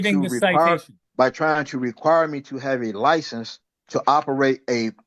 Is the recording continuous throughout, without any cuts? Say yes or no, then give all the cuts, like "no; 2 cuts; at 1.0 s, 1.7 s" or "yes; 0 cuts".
no; 1 cut; at 1.0 s